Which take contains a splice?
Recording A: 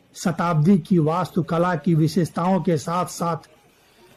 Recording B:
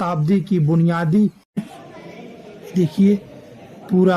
B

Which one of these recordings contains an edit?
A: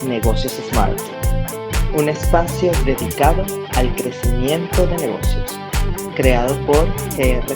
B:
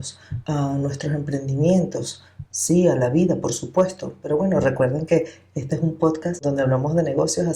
B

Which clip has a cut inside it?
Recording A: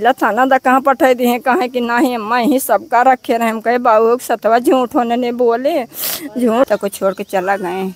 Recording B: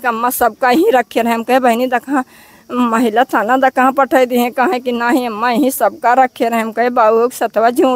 A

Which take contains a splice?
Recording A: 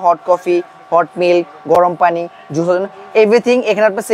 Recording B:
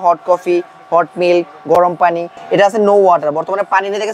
B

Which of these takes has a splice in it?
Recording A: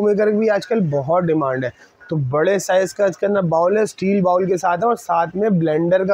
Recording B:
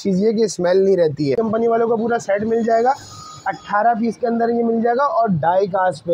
B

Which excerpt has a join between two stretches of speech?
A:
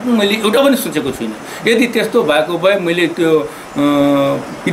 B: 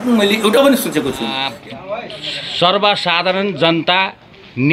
B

